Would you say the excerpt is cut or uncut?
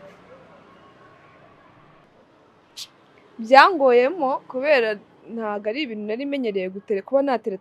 cut